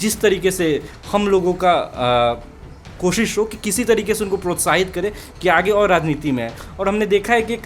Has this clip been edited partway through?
no; 0 cuts

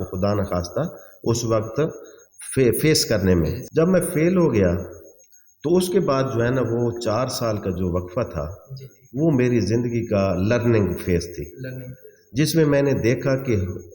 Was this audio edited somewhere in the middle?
yes; 1 cut; at 3.6 s

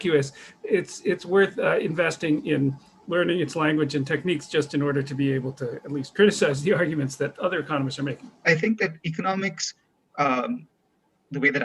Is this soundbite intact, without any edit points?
no; 1 cut; at 8.4 s

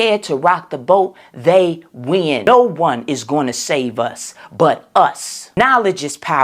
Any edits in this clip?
yes; 2 cuts; at 2.4 s, 5.5 s

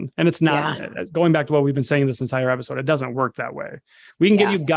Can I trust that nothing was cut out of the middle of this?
yes; 0 cuts

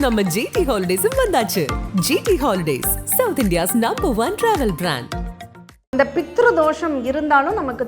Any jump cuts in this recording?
yes; 1 cut; at 5.8 s

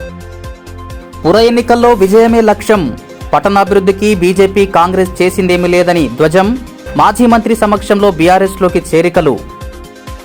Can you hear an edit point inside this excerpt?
yes; 1 cut; at 1.0 s

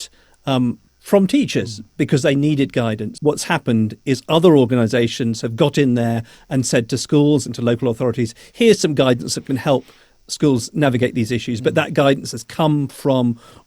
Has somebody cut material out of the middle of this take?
yes; 1 cut; at 3.1 s

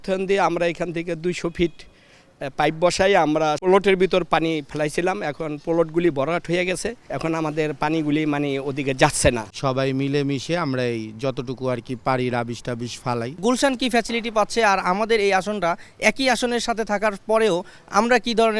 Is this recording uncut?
yes; 0 cuts

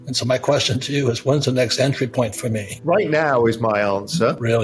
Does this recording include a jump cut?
yes; 1 cut; at 2.7 s

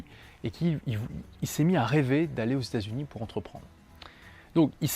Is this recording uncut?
no; 1 cut; at 1.9 s

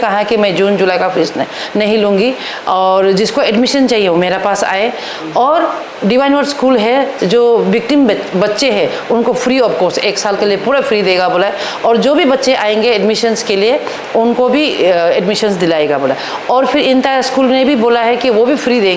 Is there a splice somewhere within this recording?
no; 0 cuts

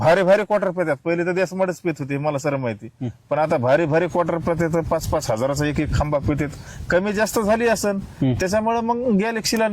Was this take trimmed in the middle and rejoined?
yes; 1 cut; at 3.4 s

